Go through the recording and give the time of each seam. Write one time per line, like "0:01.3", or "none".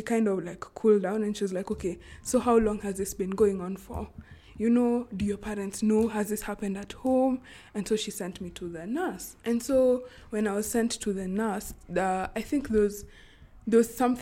none